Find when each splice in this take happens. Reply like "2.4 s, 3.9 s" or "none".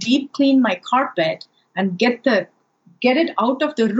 none